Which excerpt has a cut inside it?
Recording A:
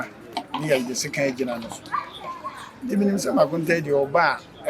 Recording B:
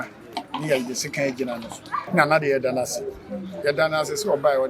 B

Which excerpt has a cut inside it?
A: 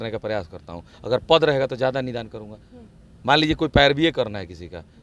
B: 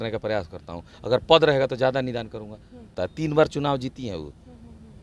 B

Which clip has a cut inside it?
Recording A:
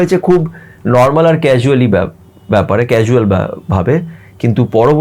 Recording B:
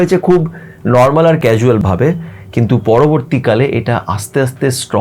B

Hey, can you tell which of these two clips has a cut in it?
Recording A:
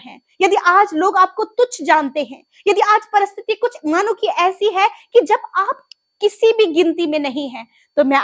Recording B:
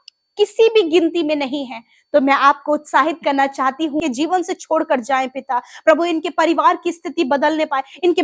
B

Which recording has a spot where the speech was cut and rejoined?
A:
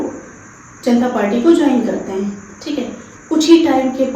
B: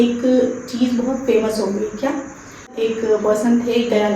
B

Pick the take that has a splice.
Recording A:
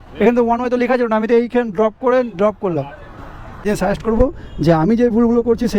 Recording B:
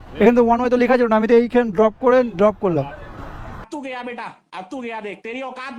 A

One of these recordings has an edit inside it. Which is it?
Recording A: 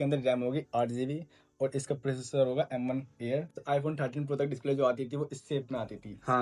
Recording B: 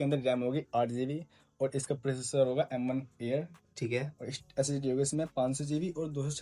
A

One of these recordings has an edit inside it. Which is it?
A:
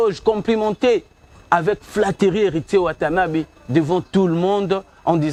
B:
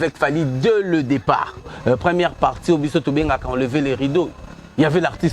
B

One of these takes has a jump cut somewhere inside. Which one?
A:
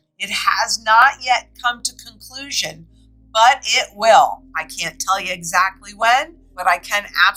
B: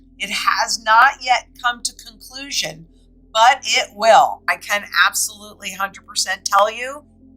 B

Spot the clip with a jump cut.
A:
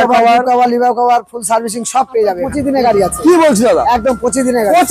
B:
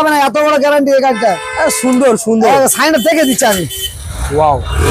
A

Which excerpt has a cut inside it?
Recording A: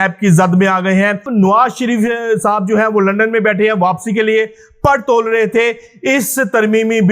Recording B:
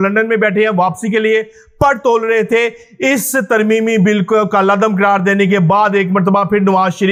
A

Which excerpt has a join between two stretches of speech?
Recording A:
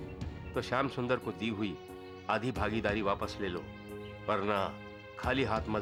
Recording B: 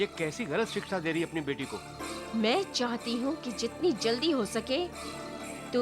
B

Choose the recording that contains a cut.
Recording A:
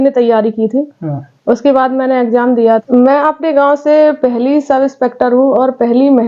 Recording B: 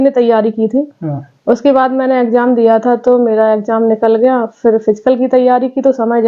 A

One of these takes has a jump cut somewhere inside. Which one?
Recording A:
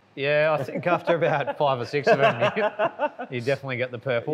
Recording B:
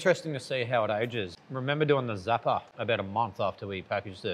B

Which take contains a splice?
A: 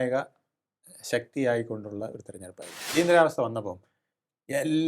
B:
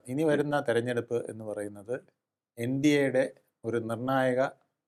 A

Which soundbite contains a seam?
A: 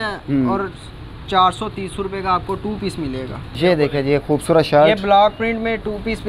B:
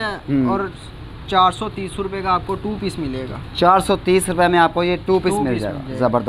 A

